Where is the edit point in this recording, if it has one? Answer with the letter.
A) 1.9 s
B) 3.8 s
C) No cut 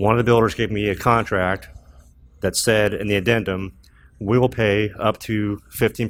C